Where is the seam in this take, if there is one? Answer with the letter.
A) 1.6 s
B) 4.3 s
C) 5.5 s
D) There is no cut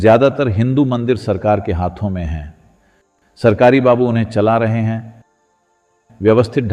D